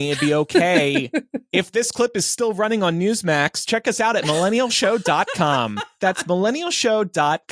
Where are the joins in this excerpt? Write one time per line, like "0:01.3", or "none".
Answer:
0:01.4